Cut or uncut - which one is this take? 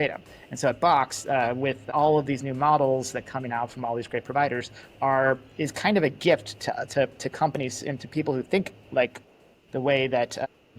cut